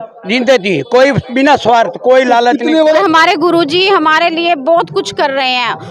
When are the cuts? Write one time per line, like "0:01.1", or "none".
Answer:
0:03.0